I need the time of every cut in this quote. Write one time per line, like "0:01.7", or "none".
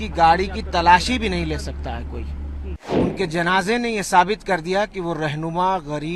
0:02.8